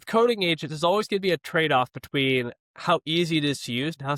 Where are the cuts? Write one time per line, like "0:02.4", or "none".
none